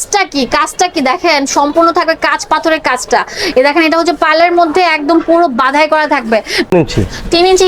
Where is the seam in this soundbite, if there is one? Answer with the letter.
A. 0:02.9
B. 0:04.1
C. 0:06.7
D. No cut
C